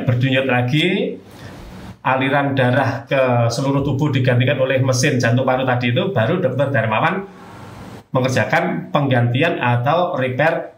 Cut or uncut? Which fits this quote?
uncut